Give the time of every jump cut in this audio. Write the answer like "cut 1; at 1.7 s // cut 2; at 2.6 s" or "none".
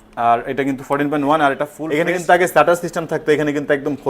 cut 1; at 1.8 s